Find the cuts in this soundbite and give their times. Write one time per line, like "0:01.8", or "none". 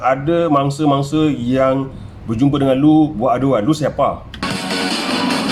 none